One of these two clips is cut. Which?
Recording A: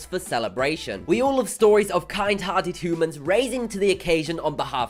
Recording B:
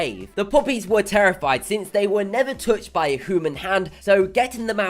B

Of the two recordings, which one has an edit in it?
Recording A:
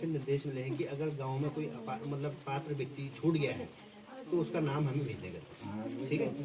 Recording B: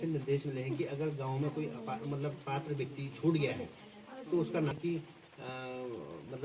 B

